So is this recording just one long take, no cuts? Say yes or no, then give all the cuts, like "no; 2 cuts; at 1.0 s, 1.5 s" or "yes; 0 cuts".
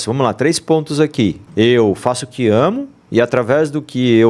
no; 1 cut; at 1.4 s